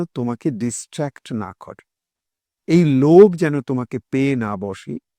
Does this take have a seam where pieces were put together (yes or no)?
no